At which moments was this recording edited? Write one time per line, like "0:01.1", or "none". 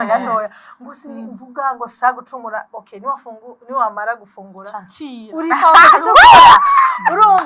none